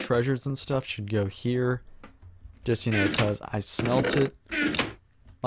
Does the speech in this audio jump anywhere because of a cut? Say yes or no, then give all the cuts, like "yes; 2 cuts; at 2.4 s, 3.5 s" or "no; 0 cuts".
no; 0 cuts